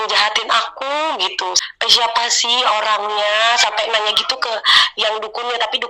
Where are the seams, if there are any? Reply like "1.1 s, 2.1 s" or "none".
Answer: 1.6 s